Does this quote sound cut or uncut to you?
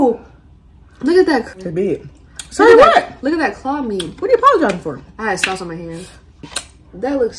cut